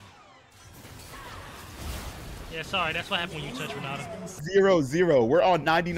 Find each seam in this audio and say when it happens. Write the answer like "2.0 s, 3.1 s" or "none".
4.4 s